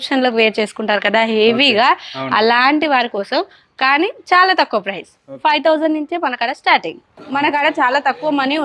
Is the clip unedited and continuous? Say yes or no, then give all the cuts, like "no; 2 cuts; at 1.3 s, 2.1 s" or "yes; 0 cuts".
no; 1 cut; at 7.2 s